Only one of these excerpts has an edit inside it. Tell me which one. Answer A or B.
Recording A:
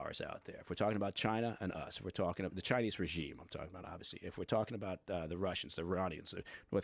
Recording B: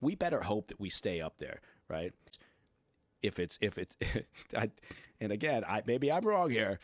B